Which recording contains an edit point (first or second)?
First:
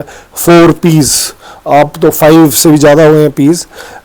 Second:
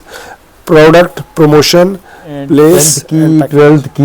second